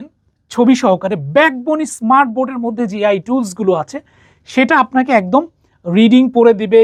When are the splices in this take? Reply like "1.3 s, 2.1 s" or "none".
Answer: none